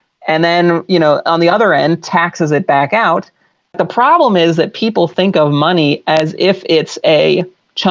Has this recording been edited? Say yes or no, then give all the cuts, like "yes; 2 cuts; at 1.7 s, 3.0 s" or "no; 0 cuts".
yes; 1 cut; at 3.7 s